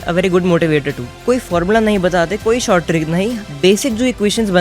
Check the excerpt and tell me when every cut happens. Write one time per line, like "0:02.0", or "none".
0:01.2